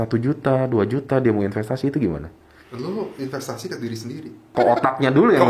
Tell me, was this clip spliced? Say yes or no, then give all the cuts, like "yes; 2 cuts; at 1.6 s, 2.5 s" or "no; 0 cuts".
yes; 1 cut; at 4.5 s